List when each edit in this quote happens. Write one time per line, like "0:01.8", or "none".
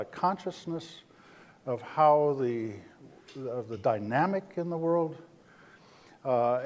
0:04.5